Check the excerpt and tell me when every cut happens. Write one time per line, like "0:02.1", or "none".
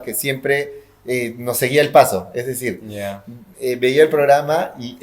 none